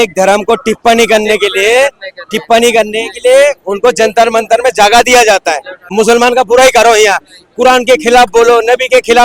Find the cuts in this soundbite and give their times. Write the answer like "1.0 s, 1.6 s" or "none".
5.9 s